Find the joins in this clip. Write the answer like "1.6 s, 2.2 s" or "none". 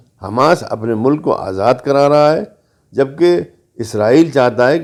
none